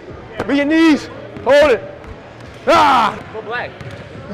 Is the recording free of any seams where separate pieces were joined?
no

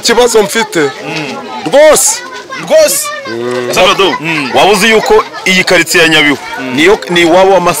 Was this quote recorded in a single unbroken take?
yes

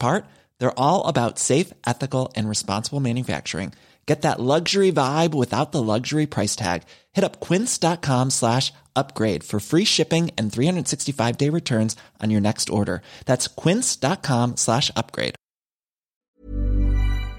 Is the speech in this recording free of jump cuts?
no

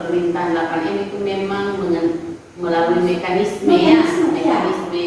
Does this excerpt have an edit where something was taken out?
no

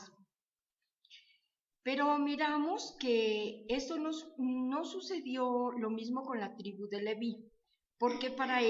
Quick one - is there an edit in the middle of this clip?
no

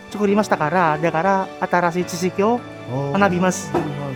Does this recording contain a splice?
no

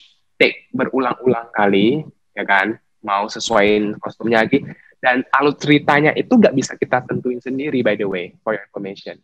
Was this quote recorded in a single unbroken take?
yes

